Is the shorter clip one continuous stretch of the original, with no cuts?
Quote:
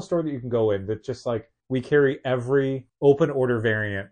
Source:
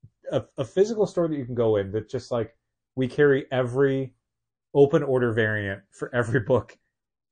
no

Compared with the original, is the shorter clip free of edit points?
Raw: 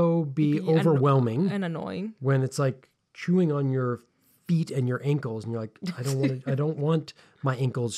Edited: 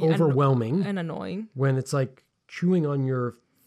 yes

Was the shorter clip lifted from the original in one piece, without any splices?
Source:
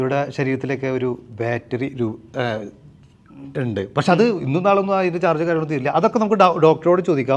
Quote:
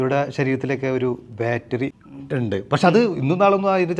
no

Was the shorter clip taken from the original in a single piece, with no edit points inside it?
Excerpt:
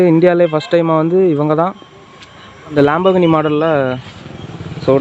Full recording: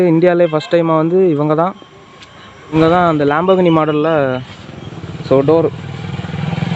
no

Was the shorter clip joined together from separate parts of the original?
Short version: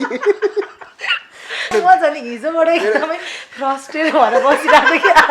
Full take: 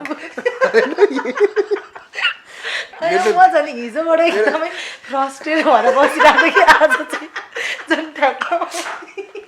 yes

